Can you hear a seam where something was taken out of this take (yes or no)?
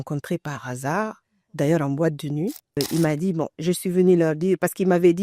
yes